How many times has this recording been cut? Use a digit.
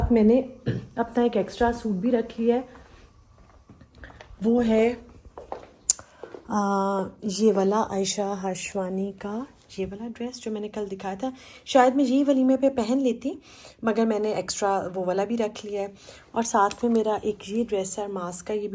0